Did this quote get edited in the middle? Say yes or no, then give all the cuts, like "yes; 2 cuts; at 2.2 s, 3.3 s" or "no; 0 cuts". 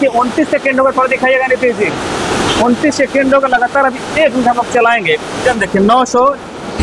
yes; 1 cut; at 5.4 s